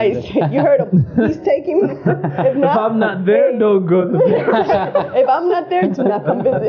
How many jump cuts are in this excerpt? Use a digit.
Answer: 0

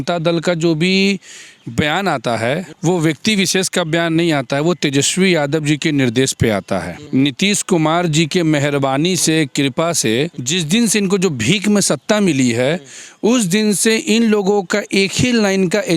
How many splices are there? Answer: 3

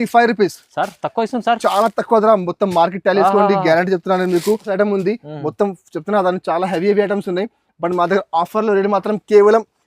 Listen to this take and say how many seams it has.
1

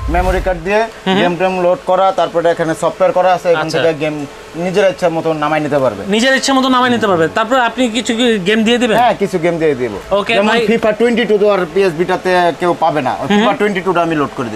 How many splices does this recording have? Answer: 0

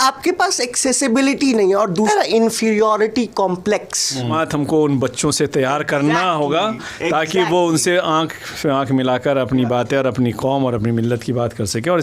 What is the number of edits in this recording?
2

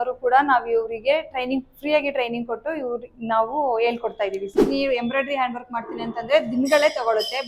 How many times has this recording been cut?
1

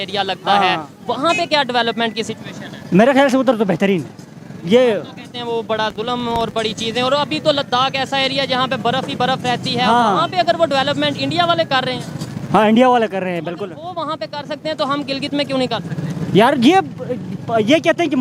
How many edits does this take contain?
0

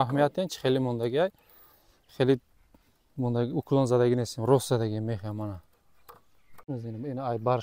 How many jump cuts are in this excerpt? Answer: 1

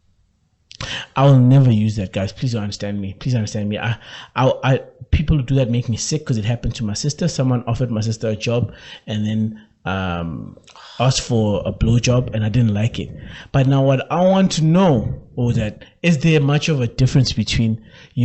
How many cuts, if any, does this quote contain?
0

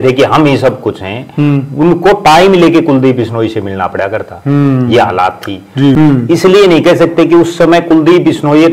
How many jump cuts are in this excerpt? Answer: 1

